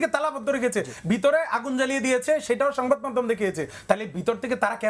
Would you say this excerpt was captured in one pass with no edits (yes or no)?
yes